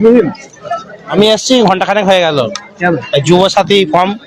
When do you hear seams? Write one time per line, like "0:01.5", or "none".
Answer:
0:01.1